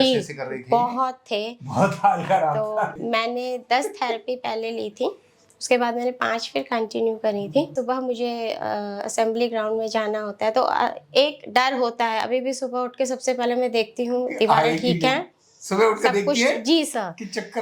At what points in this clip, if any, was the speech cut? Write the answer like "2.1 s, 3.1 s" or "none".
3.0 s, 7.7 s